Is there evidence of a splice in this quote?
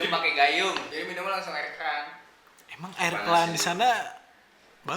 yes; 1 cut; at 0.9 s

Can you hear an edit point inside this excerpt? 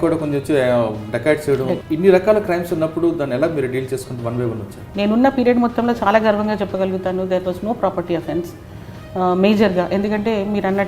yes; 2 cuts; at 1.8 s, 4.8 s

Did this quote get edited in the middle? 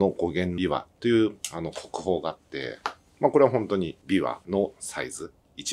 no; 0 cuts

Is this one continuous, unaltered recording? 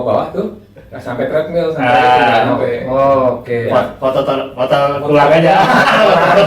yes; 0 cuts

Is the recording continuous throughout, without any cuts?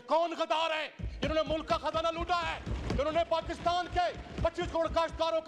yes; 0 cuts

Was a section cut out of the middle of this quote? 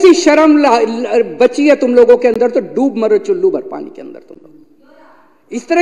no; 0 cuts

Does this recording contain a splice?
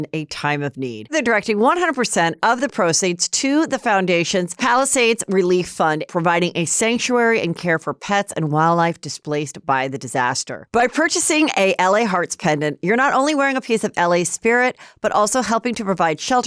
yes; 2 cuts; at 1.1 s, 10.6 s

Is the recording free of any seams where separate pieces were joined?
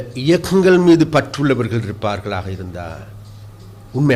yes; 0 cuts

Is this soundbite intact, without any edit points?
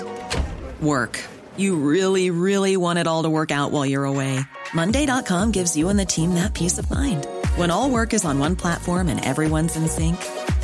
yes; 0 cuts

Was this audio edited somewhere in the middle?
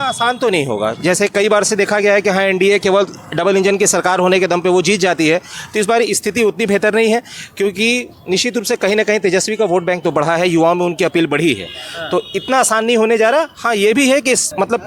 no; 0 cuts

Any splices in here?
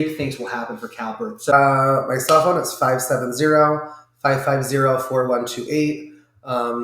yes; 1 cut; at 1.5 s

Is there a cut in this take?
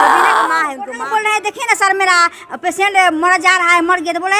yes; 1 cut; at 1.0 s

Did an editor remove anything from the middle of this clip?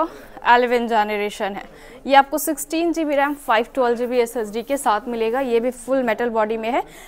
no; 0 cuts

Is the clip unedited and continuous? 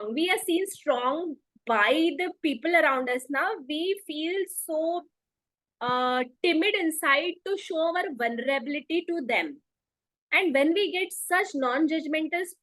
yes; 0 cuts

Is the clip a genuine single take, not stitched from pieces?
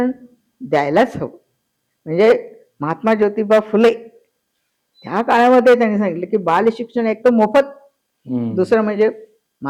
yes; 0 cuts

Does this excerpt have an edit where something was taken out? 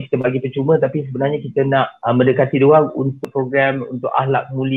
yes; 2 cuts; at 1.9 s, 3.2 s

